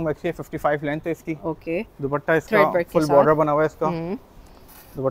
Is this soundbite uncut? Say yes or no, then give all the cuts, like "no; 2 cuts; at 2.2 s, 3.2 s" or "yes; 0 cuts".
yes; 0 cuts